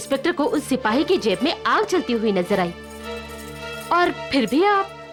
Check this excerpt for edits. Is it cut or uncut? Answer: uncut